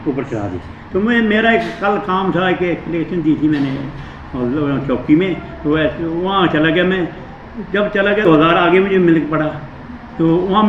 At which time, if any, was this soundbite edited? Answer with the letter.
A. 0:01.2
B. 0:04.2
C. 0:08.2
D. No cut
C